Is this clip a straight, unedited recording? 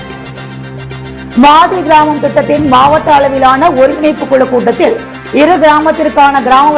no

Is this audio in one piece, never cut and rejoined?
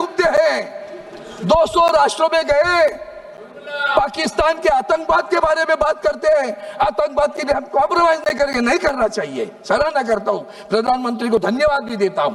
yes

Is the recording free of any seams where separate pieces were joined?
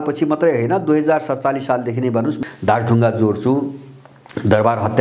no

